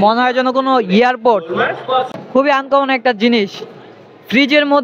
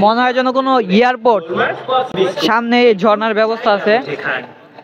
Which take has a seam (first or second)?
first